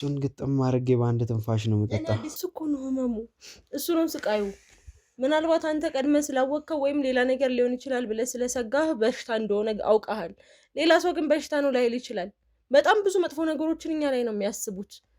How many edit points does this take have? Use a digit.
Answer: 1